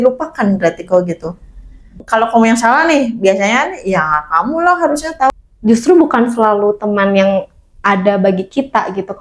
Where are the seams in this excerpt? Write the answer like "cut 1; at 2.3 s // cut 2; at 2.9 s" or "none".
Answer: cut 1; at 2.0 s // cut 2; at 5.3 s